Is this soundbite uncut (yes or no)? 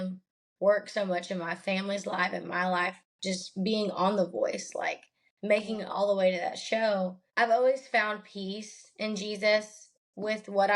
no